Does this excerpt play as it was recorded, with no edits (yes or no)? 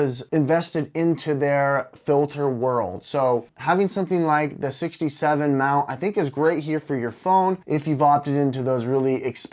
yes